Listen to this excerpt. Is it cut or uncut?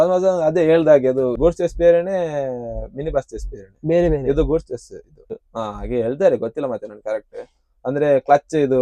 cut